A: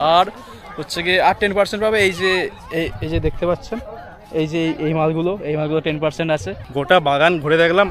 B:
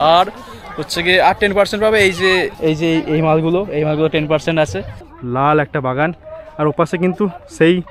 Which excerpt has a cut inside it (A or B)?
B